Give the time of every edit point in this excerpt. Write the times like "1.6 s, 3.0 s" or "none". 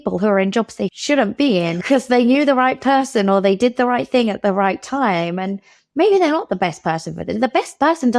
1.0 s, 1.8 s